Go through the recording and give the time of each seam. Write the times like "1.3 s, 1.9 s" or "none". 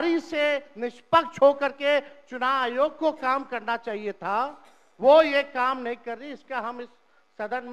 none